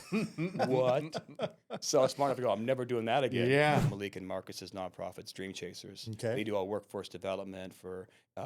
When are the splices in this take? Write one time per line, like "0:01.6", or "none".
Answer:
0:03.8